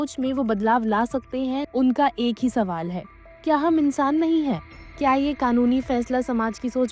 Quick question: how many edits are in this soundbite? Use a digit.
2